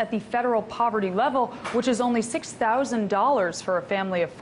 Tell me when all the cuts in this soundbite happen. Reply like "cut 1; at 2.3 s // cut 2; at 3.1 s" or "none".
cut 1; at 1.6 s